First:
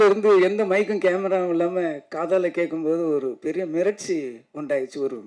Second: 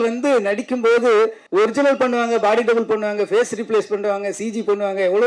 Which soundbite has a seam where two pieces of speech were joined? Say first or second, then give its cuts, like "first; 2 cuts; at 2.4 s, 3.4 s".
second; 1 cut; at 1.4 s